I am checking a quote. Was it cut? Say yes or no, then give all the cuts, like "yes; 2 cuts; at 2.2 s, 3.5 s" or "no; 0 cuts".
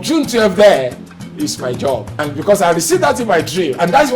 yes; 1 cut; at 2.2 s